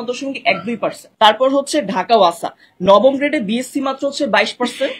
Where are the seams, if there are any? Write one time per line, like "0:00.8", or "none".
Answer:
0:01.0